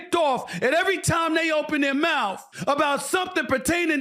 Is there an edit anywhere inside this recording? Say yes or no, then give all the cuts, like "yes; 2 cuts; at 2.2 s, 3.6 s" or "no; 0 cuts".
yes; 1 cut; at 2.5 s